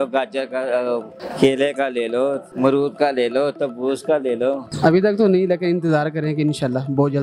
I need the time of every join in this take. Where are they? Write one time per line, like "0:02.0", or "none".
0:01.2
0:02.5
0:04.7